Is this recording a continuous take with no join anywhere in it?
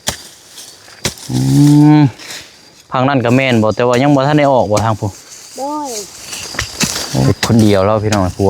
no; 1 cut; at 7.3 s

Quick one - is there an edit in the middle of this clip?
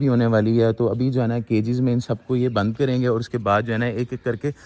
no; 0 cuts

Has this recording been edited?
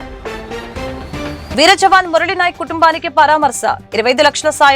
yes; 1 cut; at 1.5 s

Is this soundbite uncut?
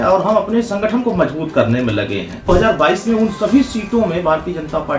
no; 1 cut; at 2.5 s

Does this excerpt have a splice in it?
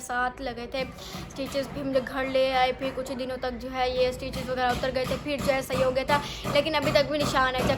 no; 0 cuts

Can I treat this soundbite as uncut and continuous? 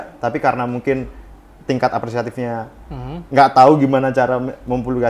yes; 0 cuts

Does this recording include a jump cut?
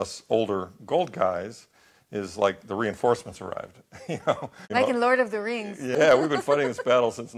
yes; 2 cuts; at 4.6 s, 5.9 s

